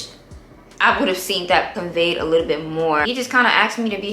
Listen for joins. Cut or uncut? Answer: cut